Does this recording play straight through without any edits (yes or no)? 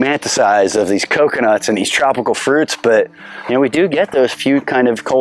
yes